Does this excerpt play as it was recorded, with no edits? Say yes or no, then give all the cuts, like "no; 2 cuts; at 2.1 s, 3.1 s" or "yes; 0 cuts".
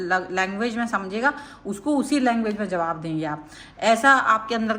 yes; 0 cuts